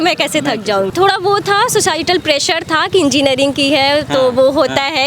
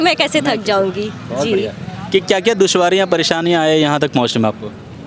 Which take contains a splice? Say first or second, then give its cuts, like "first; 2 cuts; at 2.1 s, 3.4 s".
first; 1 cut; at 0.9 s